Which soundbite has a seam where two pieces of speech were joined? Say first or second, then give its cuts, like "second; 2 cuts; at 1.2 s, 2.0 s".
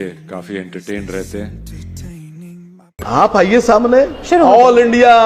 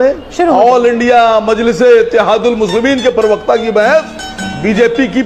first; 1 cut; at 3.0 s